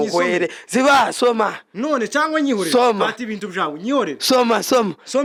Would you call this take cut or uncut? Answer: uncut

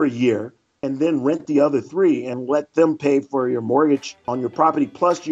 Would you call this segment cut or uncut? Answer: cut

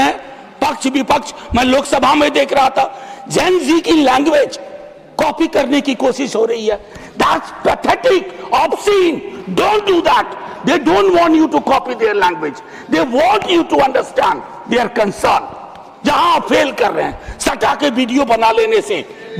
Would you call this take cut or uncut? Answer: uncut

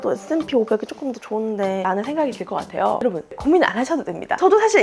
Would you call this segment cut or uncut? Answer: cut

